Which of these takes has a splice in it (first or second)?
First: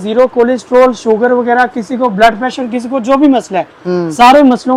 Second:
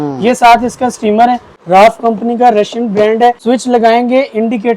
second